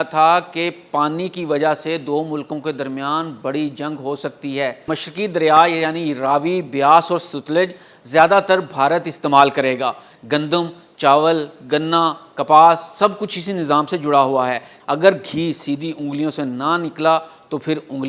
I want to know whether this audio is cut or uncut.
cut